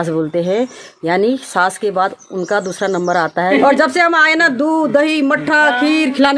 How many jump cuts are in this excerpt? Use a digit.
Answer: 1